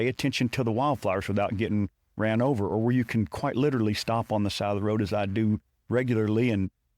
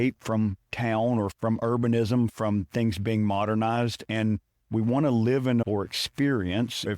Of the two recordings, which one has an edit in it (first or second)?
second